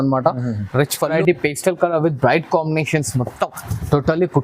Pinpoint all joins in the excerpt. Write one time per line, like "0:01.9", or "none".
0:01.2